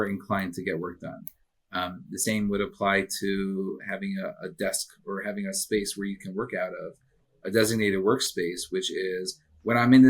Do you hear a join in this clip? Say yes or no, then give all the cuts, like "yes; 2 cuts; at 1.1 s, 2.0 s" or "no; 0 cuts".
no; 0 cuts